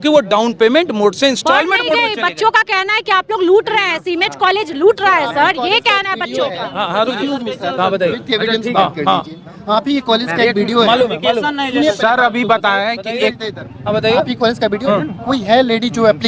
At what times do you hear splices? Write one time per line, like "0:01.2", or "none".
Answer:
none